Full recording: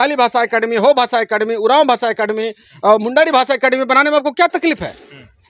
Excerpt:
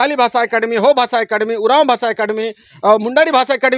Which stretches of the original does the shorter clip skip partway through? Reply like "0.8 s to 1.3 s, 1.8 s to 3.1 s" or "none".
none